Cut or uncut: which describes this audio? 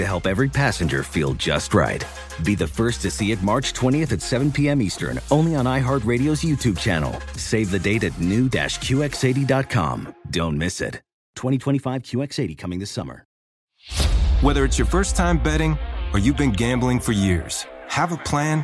cut